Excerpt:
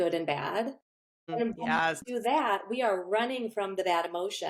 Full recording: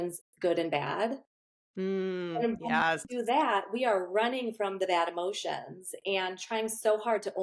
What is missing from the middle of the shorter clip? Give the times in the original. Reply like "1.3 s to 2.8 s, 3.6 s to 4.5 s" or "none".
1.7 s to 2.3 s